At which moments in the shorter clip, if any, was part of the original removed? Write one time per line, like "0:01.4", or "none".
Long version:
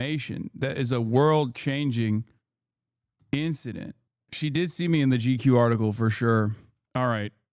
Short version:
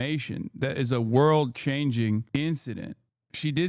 0:02.3